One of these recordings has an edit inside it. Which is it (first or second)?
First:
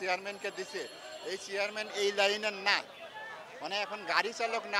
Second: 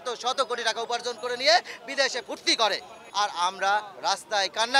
second